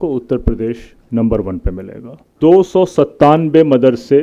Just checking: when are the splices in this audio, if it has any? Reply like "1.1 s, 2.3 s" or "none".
2.3 s